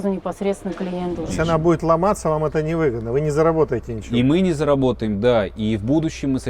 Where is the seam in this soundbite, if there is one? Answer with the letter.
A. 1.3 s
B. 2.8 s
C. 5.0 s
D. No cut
A